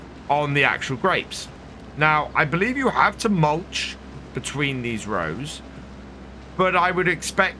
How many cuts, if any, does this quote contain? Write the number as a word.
zero